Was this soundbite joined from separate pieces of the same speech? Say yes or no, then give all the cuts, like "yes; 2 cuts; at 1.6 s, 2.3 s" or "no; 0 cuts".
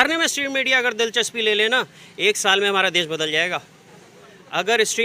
no; 0 cuts